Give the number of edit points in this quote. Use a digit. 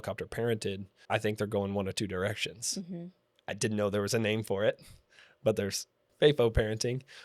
2